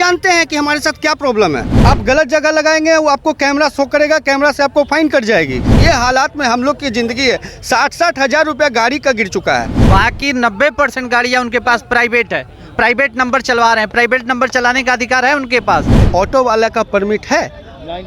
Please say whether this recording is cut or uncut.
cut